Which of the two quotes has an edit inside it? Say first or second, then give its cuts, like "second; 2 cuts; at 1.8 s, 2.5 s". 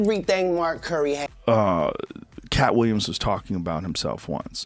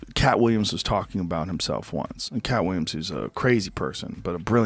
first; 1 cut; at 1.3 s